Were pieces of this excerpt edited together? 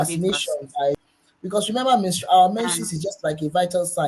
yes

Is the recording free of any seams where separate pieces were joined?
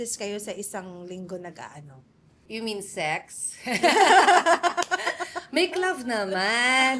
yes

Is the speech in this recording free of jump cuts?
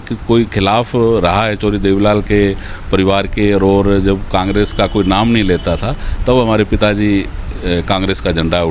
yes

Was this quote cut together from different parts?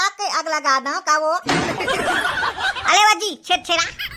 no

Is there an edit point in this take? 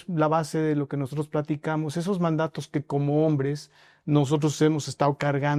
no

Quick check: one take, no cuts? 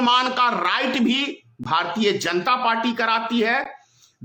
yes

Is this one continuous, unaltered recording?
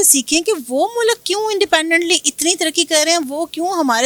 yes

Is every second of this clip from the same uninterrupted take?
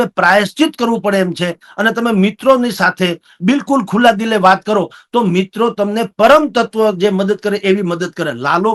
yes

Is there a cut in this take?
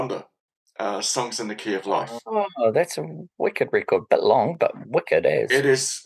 no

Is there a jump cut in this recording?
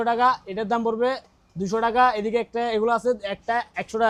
no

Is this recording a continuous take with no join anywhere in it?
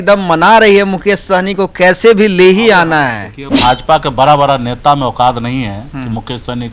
no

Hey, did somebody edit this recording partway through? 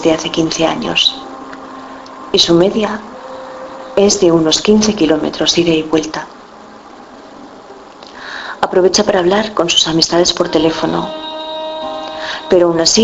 yes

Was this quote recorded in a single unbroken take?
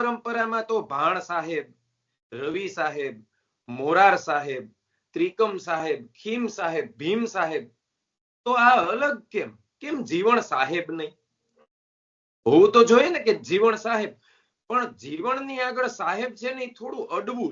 yes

